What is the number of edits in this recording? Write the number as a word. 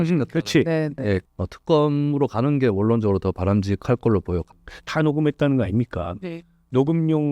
two